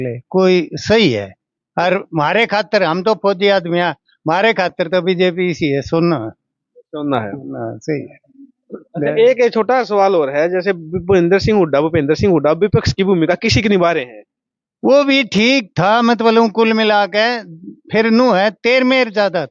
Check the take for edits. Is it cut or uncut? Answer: uncut